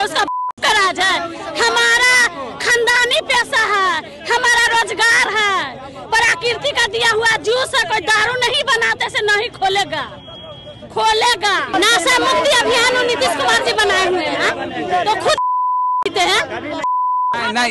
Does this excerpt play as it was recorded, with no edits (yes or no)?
no